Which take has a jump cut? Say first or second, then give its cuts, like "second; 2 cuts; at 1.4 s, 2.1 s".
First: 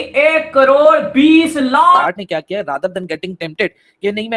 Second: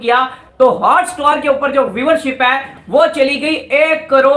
first; 1 cut; at 2.0 s